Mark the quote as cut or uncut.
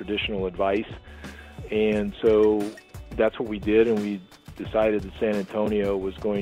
cut